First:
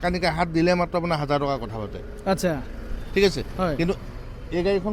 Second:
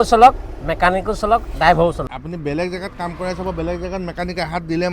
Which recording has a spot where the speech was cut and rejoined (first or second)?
second